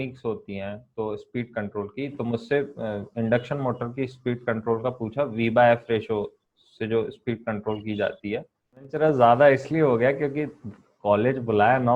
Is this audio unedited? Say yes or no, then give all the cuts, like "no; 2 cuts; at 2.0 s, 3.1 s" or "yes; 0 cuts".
no; 1 cut; at 8.9 s